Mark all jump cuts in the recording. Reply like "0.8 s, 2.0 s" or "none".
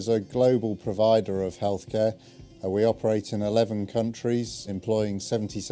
4.2 s